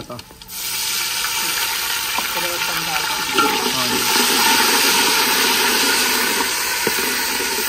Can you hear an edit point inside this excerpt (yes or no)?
no